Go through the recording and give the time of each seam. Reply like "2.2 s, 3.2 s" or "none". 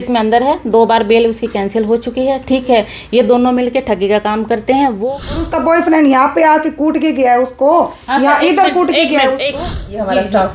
5.0 s, 9.6 s